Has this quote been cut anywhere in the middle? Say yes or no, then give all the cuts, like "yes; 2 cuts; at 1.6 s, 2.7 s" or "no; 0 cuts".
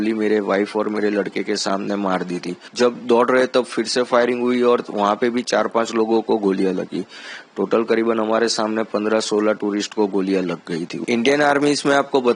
yes; 2 cuts; at 2.7 s, 11.0 s